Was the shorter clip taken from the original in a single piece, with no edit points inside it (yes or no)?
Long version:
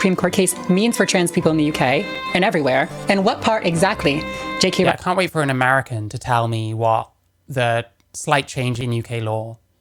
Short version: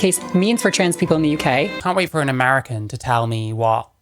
no